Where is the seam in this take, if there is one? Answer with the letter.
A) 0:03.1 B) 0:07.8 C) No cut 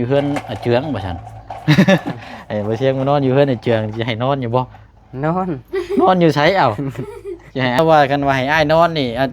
B